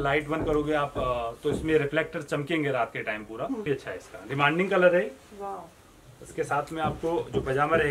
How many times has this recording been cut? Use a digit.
1